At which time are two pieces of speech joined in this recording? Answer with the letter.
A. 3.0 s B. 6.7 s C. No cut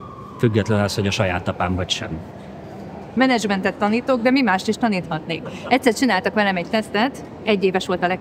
A